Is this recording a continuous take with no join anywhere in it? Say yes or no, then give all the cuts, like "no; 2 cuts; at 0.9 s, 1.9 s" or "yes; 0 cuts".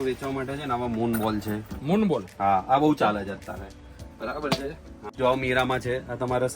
no; 1 cut; at 5.1 s